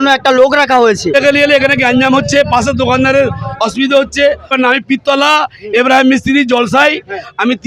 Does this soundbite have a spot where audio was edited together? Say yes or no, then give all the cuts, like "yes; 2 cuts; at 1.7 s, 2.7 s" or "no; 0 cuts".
yes; 2 cuts; at 1.1 s, 4.5 s